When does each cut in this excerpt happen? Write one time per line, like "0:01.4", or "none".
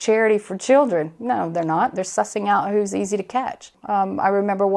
0:03.7